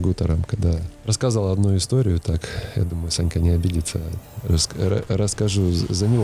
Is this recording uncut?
yes; 0 cuts

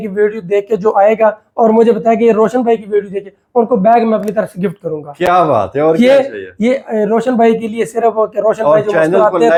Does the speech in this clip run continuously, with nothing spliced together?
yes; 0 cuts

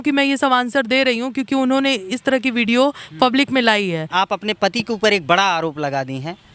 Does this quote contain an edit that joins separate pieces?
yes; 1 cut; at 4.1 s

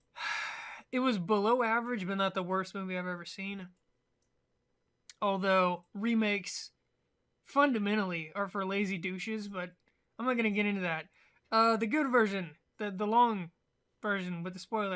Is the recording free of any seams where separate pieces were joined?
yes; 0 cuts

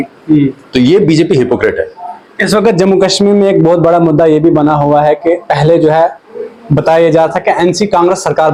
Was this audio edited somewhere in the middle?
no; 0 cuts

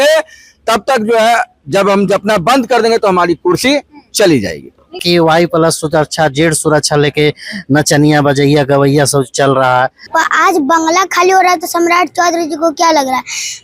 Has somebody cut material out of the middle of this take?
yes; 2 cuts; at 5.0 s, 10.0 s

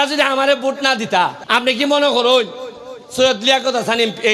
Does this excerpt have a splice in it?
yes; 1 cut; at 1.4 s

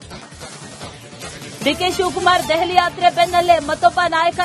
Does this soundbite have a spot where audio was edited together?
yes; 1 cut; at 1.0 s

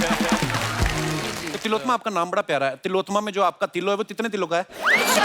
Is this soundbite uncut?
no; 1 cut; at 1.5 s

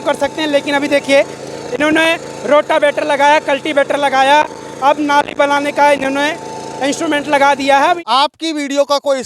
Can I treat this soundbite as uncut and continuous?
no; 1 cut; at 8.0 s

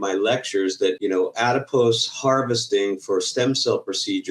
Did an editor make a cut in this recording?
yes; 1 cut; at 1.0 s

